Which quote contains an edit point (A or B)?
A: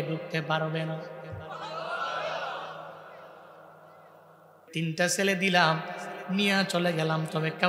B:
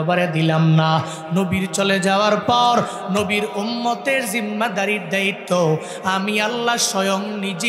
A